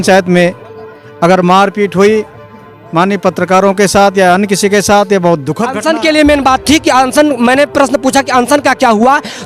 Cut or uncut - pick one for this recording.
cut